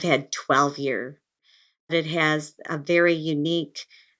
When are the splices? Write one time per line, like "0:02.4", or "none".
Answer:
0:01.3